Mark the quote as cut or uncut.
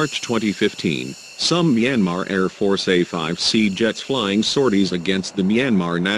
uncut